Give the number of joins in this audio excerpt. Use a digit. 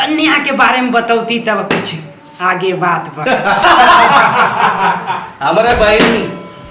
1